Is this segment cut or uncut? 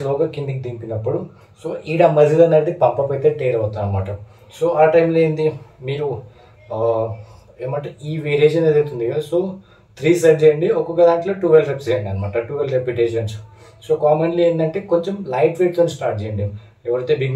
uncut